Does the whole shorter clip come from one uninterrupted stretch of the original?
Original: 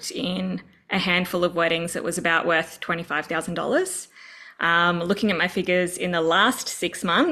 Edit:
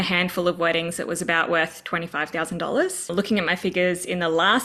no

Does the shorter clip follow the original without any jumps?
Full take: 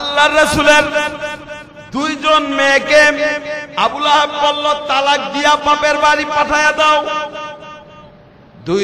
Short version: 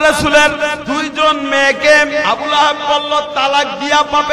no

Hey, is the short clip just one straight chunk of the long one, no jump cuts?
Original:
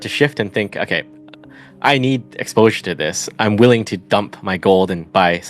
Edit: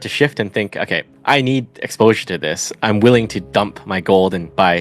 no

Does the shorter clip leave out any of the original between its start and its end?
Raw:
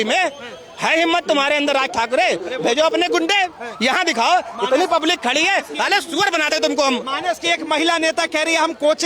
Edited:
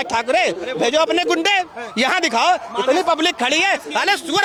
no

